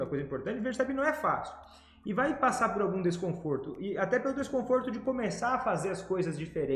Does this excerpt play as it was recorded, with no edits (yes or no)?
yes